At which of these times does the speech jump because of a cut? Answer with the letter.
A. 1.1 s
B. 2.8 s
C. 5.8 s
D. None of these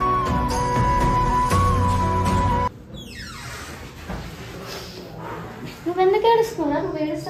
B